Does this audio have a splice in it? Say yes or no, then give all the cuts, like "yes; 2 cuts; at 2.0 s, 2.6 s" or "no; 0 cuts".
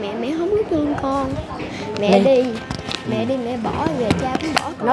yes; 1 cut; at 1.6 s